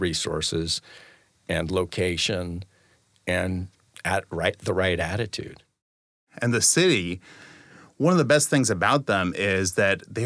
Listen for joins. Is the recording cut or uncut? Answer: cut